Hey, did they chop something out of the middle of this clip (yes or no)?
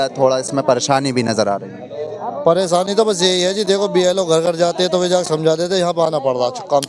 no